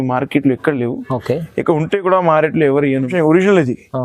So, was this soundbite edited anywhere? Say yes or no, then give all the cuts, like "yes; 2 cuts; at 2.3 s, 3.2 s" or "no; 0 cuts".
yes; 1 cut; at 3.1 s